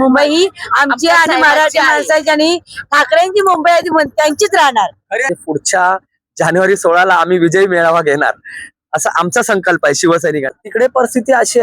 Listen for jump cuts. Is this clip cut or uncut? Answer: cut